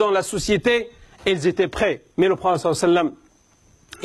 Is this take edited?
yes; 1 cut; at 2.0 s

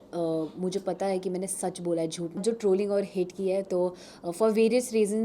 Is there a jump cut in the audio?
yes; 1 cut; at 2.4 s

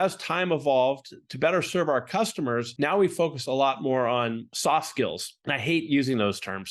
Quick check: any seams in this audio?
yes; 3 cuts; at 2.7 s, 4.5 s, 5.3 s

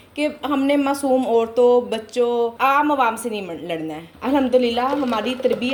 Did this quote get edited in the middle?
no; 0 cuts

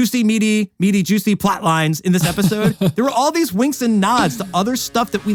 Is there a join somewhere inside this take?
no; 0 cuts

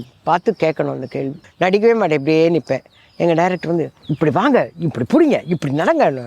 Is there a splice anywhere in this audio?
yes; 1 cut; at 1.4 s

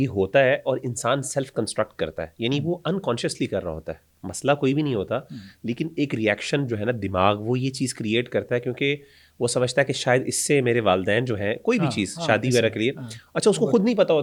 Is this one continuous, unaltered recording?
yes; 0 cuts

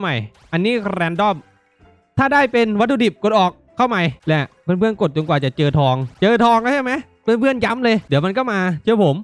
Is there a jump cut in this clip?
yes; 3 cuts; at 4.2 s, 6.1 s, 8.1 s

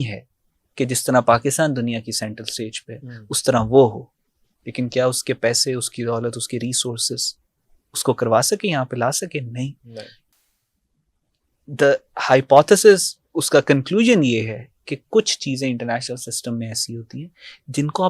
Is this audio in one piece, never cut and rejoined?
yes; 0 cuts

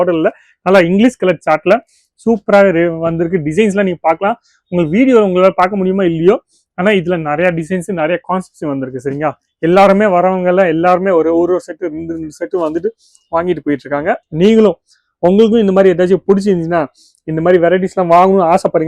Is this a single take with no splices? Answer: yes; 0 cuts

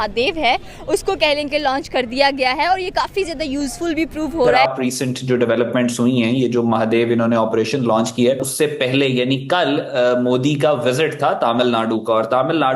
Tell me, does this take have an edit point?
yes; 2 cuts; at 4.6 s, 8.5 s

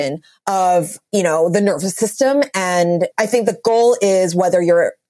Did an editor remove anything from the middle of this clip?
yes; 2 cuts; at 1.0 s, 3.1 s

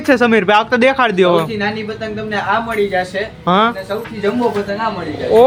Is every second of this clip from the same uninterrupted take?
yes; 0 cuts

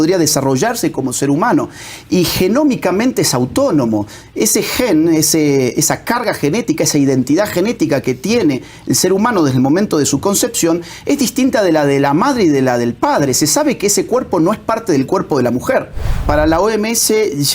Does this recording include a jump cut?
yes; 1 cut; at 16.2 s

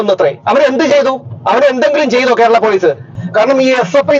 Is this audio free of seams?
no; 1 cut; at 3.2 s

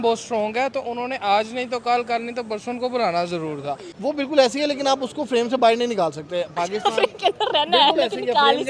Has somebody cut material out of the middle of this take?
yes; 1 cut; at 3.9 s

